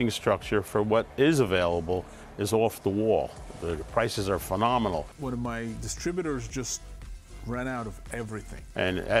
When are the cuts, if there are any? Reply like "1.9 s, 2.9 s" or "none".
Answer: 5.1 s